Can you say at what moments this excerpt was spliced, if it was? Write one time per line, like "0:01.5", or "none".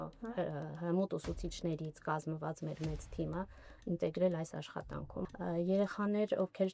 0:05.2